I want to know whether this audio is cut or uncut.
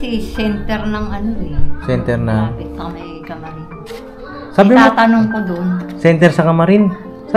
uncut